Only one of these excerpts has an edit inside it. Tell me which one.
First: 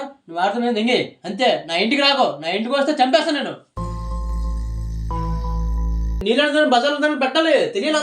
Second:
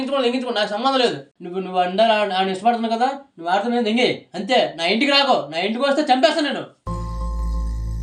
first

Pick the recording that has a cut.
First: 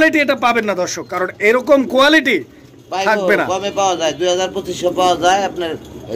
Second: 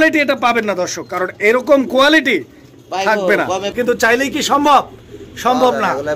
second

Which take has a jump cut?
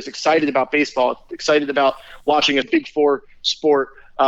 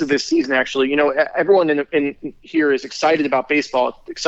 first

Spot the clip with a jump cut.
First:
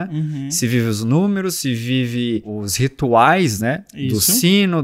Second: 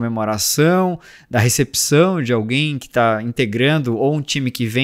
first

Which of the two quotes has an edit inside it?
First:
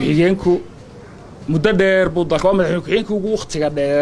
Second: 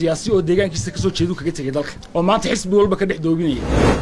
second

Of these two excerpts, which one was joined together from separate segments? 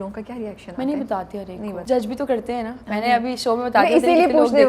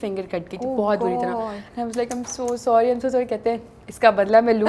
first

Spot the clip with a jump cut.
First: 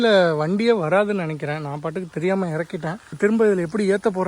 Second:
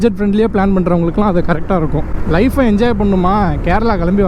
first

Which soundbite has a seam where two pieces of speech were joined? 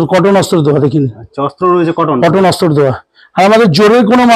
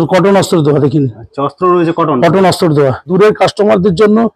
second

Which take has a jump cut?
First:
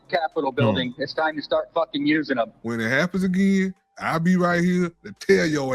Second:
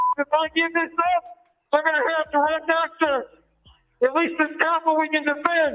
first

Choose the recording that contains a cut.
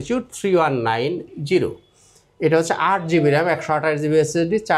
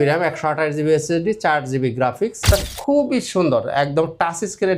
second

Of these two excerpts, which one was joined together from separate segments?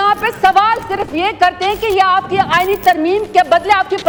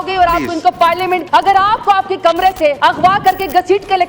second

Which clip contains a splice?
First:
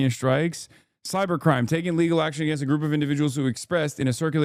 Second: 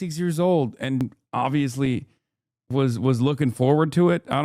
second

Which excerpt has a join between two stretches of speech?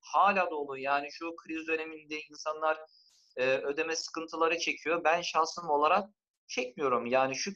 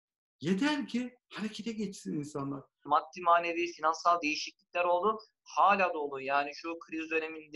second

